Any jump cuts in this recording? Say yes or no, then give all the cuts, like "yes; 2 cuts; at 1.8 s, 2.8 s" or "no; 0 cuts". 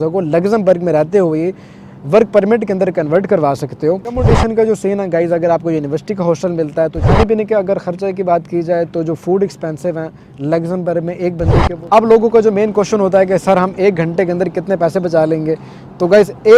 yes; 3 cuts; at 4.2 s, 7.0 s, 11.7 s